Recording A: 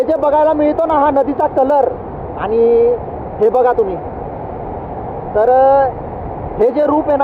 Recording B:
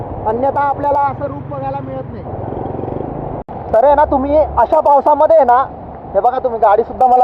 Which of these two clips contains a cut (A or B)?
B